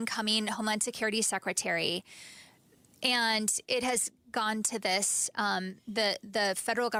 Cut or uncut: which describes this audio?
uncut